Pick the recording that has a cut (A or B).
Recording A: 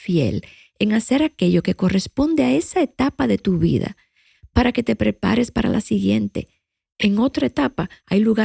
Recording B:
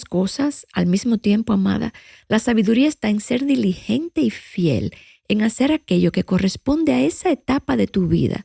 A